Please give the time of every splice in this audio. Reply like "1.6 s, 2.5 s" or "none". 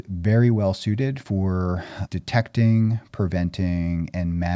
1.9 s